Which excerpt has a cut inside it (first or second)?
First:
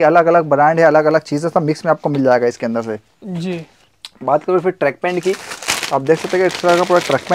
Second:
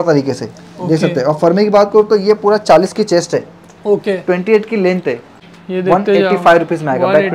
second